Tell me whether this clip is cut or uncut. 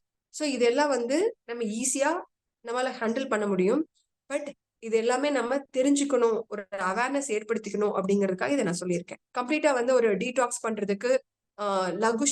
cut